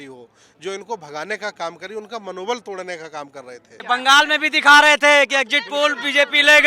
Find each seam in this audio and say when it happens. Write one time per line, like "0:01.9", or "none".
0:03.8